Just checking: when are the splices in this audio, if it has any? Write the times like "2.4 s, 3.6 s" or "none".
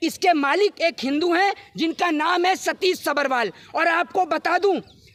none